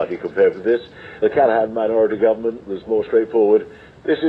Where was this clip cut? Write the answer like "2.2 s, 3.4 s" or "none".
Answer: 1.2 s